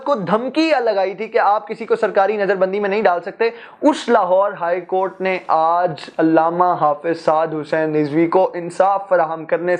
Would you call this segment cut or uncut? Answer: uncut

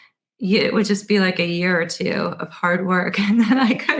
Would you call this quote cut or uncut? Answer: uncut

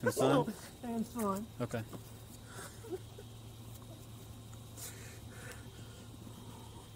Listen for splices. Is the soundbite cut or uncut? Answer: uncut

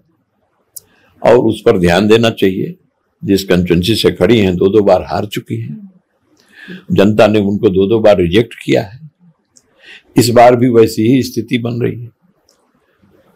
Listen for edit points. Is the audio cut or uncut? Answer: uncut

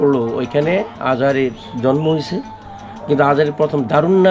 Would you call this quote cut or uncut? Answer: uncut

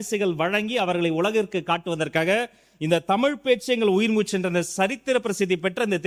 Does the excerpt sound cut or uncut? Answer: uncut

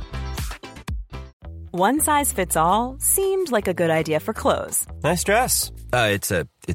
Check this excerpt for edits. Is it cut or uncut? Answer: cut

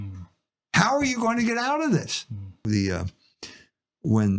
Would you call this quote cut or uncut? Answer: cut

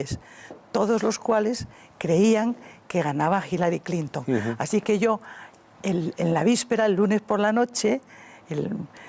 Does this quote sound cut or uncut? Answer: cut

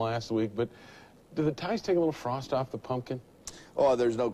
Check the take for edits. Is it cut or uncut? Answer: cut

